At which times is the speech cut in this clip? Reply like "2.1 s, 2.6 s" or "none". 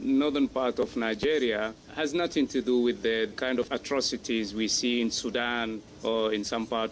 1.8 s, 3.4 s, 5.9 s